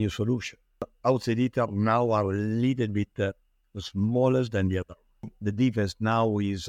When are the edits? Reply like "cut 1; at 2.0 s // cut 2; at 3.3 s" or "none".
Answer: cut 1; at 0.9 s // cut 2; at 5.4 s